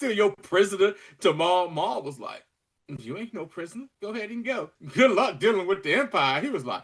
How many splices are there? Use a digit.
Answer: 2